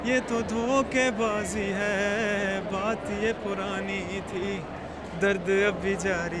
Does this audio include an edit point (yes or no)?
no